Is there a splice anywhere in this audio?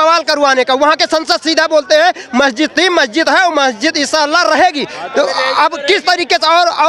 no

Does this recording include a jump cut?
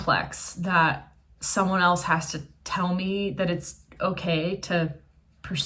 no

